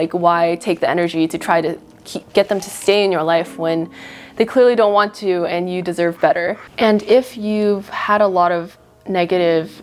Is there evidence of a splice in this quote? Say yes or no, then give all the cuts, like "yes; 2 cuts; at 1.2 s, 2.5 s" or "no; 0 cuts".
no; 0 cuts